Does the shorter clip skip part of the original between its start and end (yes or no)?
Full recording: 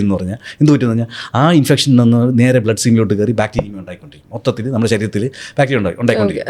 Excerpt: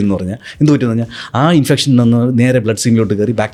no